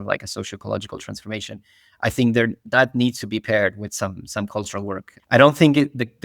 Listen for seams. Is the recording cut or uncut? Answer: cut